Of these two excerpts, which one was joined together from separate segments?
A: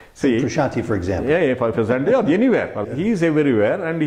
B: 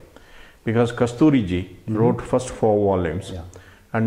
A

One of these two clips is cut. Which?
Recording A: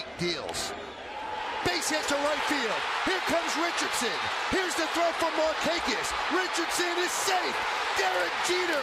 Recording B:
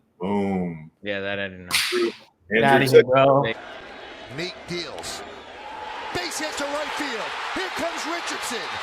B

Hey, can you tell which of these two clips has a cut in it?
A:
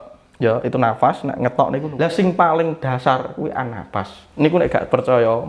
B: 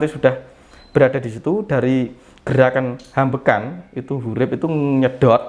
A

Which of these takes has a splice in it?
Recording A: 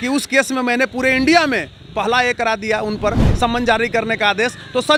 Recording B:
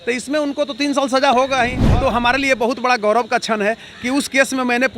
B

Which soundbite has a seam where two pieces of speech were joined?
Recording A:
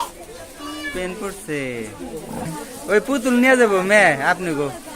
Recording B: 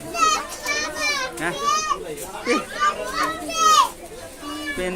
A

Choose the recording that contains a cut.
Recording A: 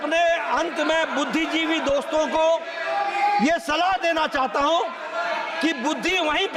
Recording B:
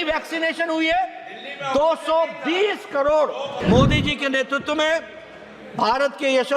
B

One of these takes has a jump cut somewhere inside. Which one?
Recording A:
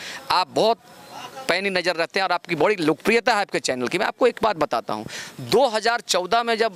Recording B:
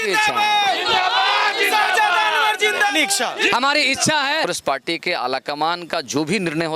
B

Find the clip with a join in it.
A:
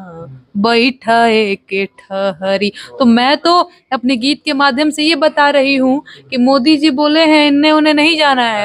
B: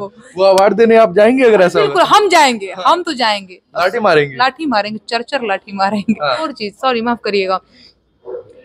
B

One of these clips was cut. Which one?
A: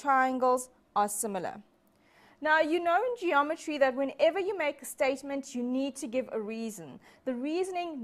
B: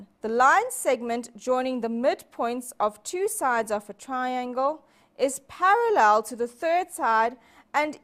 B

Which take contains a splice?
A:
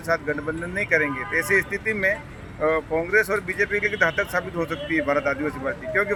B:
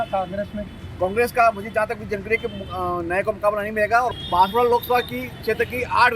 B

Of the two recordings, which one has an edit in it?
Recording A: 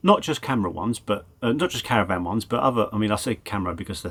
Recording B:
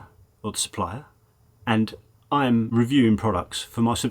B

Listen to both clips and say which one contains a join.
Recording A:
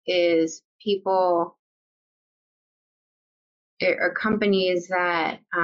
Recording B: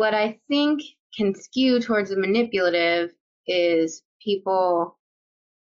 B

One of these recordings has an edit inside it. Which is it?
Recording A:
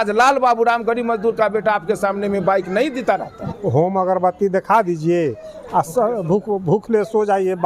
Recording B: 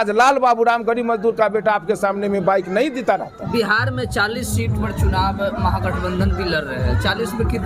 A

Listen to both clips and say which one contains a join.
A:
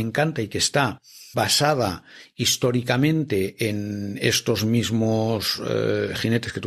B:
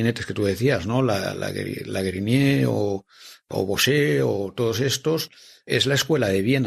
B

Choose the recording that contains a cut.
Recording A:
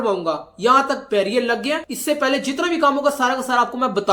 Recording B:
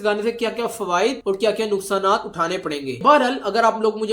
B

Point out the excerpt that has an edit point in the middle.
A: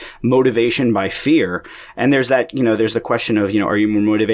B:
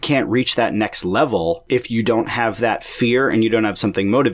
B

